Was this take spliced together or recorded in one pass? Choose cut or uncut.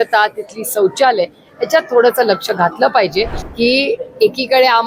cut